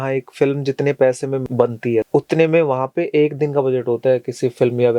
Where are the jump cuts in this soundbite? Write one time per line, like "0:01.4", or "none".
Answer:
0:01.4